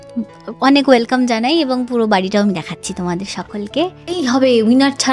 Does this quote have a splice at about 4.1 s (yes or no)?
yes